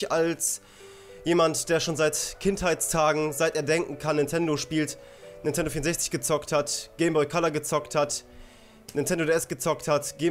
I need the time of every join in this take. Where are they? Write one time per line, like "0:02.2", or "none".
0:07.3